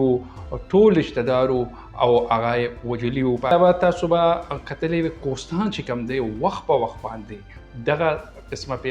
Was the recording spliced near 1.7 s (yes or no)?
no